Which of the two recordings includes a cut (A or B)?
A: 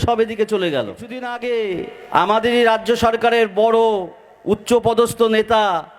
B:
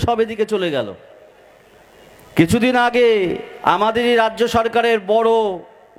A